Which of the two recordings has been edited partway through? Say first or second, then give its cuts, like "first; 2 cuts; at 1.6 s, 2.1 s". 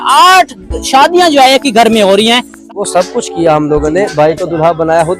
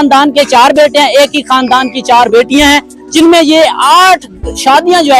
first; 1 cut; at 2.5 s